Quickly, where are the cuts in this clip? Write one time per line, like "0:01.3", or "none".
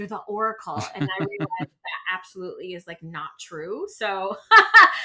none